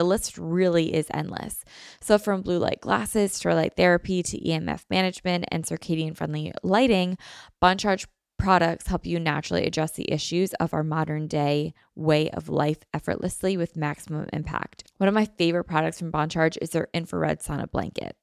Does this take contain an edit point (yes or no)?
no